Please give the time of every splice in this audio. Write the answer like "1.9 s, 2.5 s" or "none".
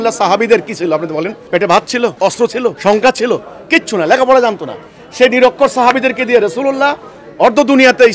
1.4 s, 2.5 s